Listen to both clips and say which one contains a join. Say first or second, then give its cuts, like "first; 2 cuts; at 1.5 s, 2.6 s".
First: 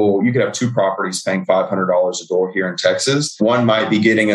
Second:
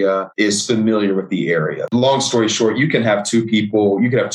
second; 1 cut; at 1.8 s